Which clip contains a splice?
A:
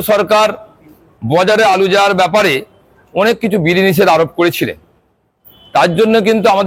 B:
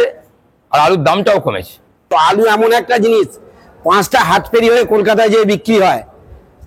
B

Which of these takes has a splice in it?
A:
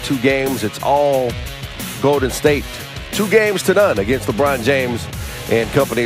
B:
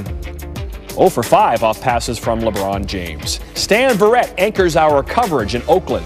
B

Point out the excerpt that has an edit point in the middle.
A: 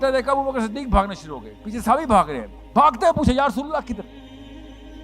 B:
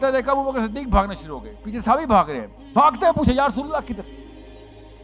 A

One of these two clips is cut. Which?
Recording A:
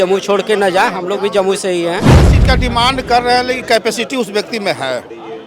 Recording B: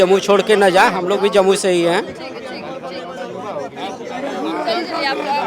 A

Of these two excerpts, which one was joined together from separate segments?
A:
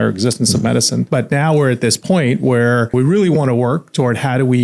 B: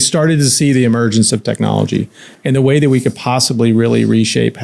A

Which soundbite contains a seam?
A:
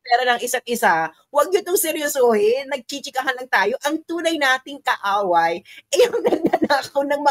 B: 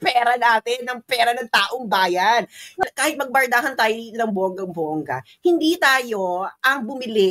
B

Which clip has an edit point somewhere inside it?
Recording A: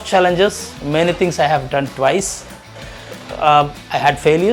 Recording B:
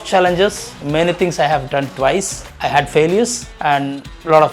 B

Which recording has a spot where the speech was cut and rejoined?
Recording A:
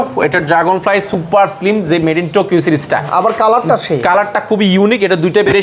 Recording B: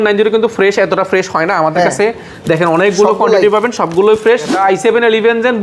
B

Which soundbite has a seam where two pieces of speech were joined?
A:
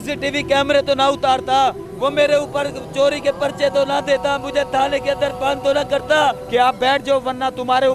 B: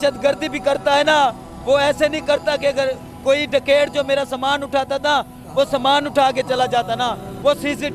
A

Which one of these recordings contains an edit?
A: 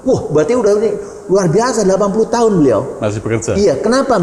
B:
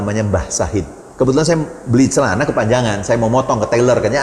B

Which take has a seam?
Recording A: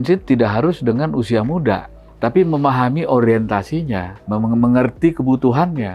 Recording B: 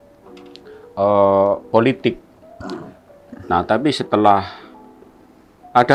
A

